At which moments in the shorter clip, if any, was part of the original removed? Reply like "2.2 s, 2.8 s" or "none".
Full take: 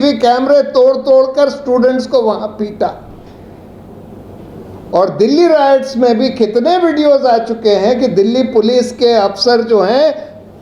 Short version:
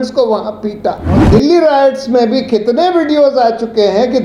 1.2 s

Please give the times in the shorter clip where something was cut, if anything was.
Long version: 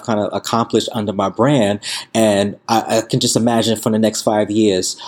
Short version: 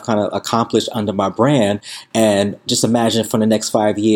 2.6 s

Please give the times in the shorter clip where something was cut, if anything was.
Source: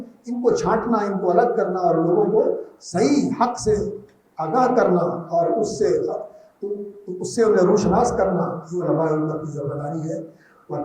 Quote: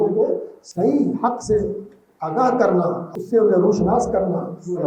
3.0 s

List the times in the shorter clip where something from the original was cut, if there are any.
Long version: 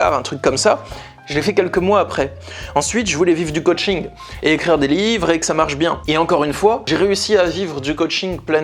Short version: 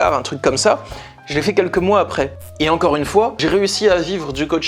2.5 s

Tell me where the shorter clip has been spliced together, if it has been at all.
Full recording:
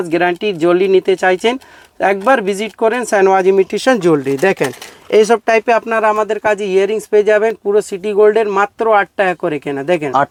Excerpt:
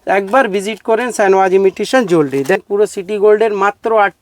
2.6 s

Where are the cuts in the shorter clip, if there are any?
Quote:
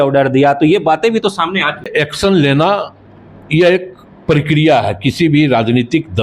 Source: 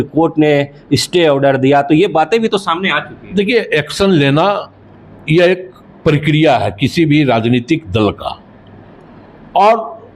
1.9 s

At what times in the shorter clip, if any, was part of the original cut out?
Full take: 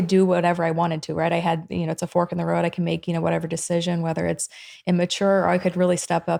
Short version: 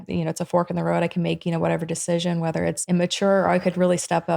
2.8 s

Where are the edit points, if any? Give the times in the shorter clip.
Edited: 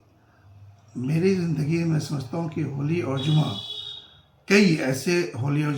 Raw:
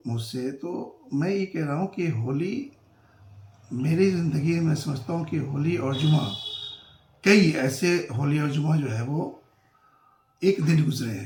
none

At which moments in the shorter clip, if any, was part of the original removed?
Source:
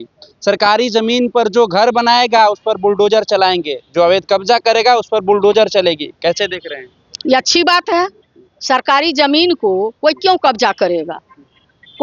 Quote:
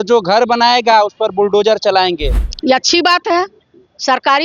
2.3 s

